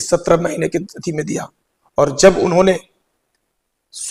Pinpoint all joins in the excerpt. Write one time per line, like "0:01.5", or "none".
none